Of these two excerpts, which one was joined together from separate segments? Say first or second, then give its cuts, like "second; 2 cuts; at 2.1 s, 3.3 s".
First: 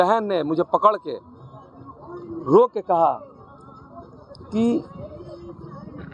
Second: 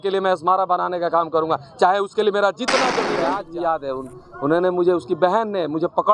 second; 1 cut; at 3.2 s